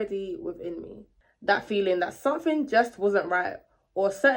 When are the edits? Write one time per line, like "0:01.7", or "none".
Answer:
0:01.0

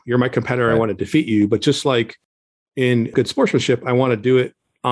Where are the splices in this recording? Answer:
0:03.1

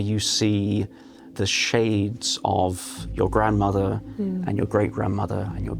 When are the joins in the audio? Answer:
0:01.3

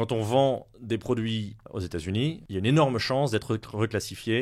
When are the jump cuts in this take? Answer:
0:01.6
0:02.4

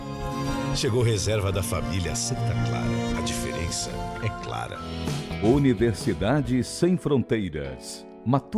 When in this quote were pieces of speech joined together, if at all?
none

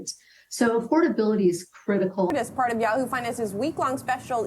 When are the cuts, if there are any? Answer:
0:02.3

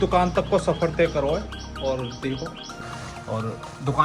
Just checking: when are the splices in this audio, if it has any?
0:02.6

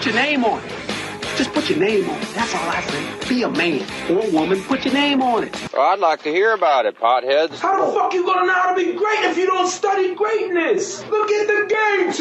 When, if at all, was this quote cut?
0:03.3

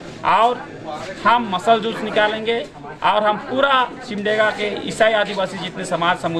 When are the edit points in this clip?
none

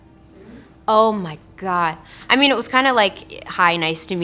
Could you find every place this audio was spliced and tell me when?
0:02.1

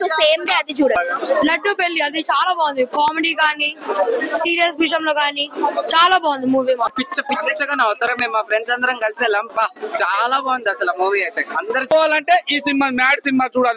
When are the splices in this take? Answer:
0:01.0
0:06.9
0:11.9

